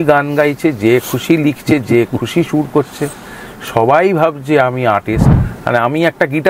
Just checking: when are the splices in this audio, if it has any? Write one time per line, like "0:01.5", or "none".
0:05.3